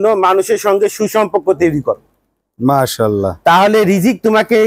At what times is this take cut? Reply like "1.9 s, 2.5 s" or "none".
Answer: none